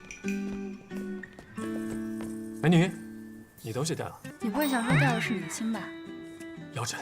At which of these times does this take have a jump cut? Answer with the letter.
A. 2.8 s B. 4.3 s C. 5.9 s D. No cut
B